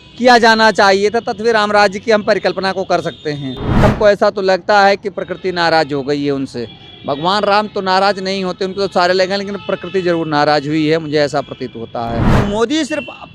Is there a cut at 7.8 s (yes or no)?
no